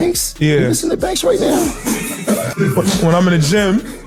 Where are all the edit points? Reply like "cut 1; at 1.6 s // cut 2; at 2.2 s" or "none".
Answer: cut 1; at 2.5 s